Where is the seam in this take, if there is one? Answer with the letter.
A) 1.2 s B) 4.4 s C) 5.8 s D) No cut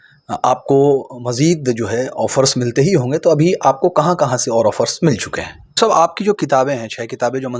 C